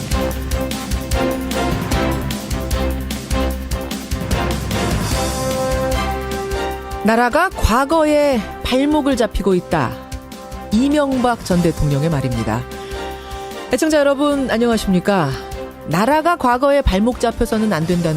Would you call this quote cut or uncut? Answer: cut